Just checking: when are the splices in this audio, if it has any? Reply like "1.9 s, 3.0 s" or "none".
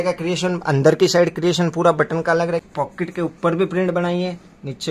2.6 s